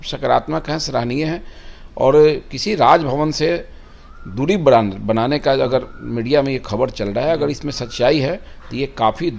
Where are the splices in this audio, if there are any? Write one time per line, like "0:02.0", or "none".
none